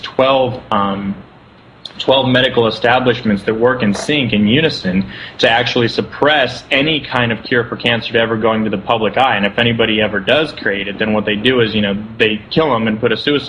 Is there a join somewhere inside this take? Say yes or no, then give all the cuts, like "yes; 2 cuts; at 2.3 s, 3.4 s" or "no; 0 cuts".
yes; 1 cut; at 4.9 s